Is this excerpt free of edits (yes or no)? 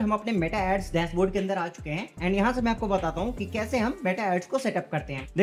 yes